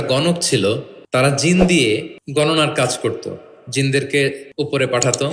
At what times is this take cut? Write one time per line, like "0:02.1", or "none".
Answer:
0:00.9
0:02.2
0:04.4